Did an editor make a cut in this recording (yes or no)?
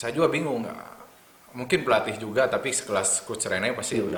no